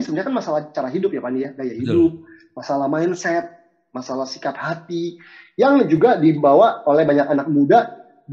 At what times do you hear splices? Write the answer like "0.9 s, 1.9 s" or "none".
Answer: none

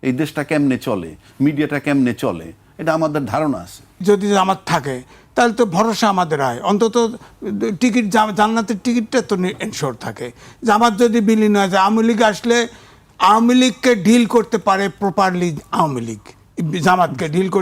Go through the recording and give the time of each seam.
4.0 s

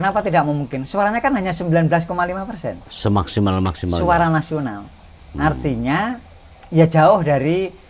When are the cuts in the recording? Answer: none

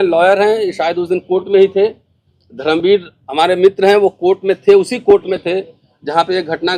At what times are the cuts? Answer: none

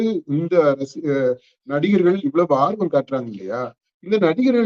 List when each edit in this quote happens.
none

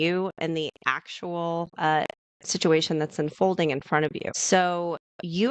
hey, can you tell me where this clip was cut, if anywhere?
4.3 s

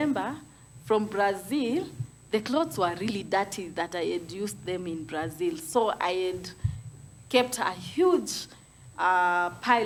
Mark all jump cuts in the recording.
none

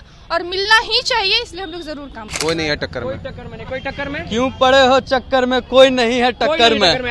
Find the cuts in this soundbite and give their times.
2.3 s

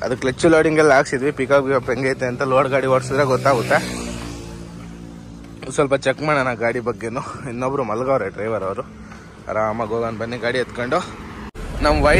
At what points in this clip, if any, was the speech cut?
none

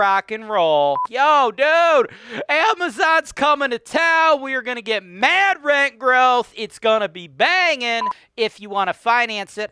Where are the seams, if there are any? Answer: 1.1 s, 8.2 s

